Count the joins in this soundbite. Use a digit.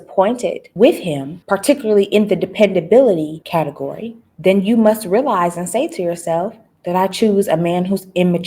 1